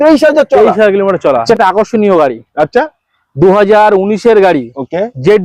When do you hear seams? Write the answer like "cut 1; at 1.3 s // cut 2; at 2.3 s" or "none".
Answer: cut 1; at 1.4 s